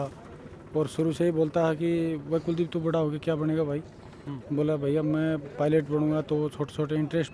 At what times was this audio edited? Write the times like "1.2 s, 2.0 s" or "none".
none